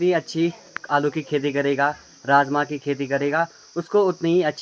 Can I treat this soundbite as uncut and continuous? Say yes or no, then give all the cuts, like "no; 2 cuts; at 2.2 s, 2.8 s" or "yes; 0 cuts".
yes; 0 cuts